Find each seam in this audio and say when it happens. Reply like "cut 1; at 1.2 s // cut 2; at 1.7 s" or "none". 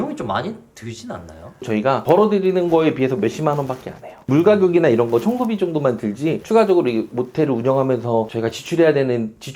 cut 1; at 1.6 s